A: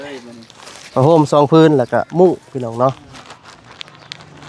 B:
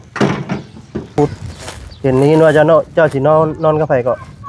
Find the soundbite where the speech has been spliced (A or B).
B